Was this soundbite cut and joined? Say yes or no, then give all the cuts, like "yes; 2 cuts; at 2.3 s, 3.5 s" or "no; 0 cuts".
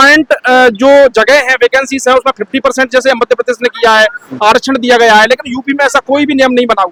no; 0 cuts